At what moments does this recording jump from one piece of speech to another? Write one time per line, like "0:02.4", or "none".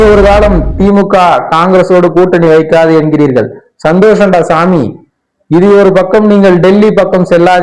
none